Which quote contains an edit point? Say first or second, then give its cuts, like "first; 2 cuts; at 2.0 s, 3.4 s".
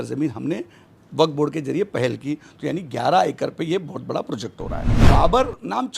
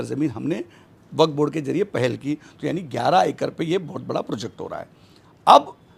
first; 1 cut; at 4.9 s